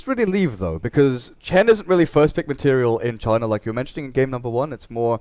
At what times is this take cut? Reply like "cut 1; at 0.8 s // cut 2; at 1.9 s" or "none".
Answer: cut 1; at 1.8 s